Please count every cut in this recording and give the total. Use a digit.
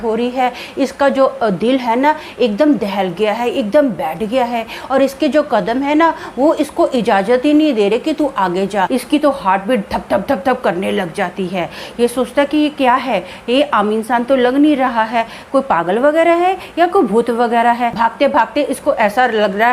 2